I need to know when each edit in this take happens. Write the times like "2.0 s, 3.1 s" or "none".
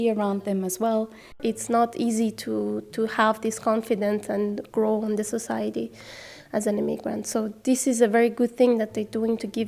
1.4 s